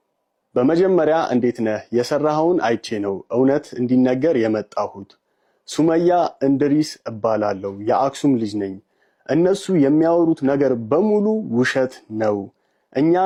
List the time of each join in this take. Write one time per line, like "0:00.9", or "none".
none